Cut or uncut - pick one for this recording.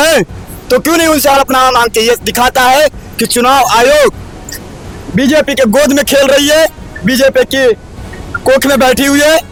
uncut